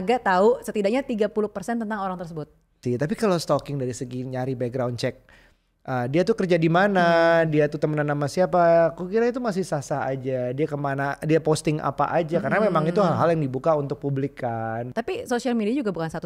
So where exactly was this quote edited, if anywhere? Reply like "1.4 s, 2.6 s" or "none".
2.8 s, 14.9 s